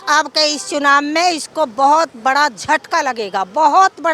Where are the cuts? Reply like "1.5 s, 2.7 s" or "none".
none